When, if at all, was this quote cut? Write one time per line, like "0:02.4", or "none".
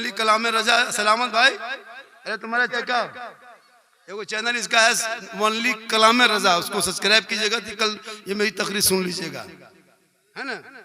0:02.7